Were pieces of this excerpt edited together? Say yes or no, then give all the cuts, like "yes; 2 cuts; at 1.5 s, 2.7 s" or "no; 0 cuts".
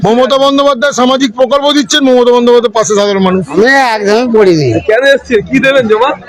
yes; 1 cut; at 3.5 s